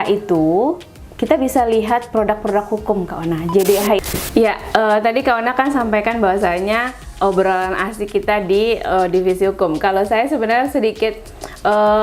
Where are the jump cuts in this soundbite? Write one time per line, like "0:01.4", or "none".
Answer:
0:04.0

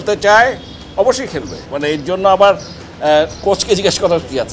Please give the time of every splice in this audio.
0:01.6

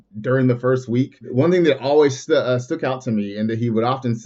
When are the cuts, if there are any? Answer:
0:01.3
0:02.2

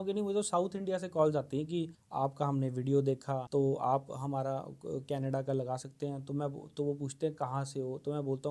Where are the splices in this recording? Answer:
0:02.0
0:03.4

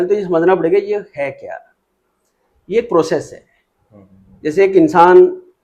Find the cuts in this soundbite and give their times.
none

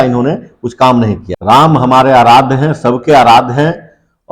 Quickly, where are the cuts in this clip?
0:01.2

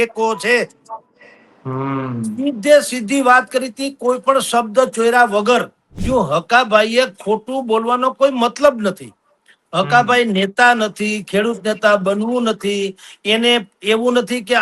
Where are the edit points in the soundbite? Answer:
0:05.9

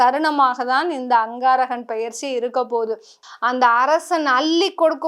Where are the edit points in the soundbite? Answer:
0:03.2

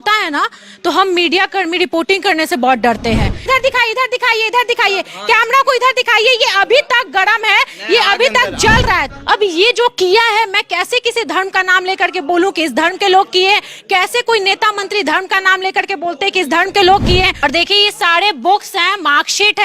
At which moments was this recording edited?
0:03.4
0:09.1
0:17.4

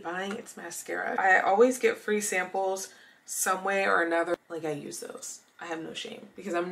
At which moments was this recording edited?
0:01.2
0:04.3

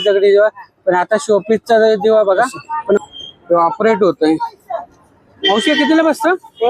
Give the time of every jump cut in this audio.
0:03.0

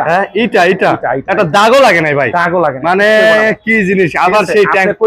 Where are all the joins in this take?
none

